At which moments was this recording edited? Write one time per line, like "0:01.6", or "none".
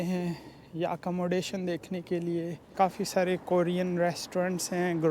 0:02.6

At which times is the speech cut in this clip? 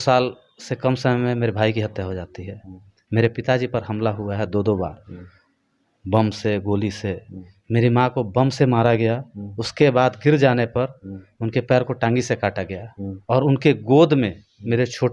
none

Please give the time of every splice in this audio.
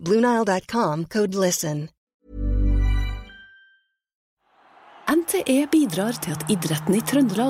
0:02.0
0:04.6

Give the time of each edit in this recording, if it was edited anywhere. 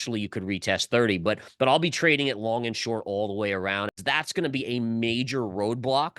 0:03.9

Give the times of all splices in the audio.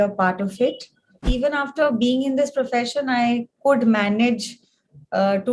0:01.3

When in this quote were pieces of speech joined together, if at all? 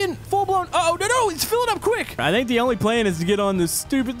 0:02.2

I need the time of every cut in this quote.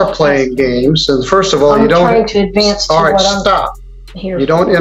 none

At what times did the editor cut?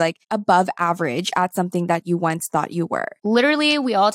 0:03.1

